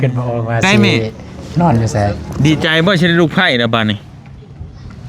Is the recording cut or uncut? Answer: cut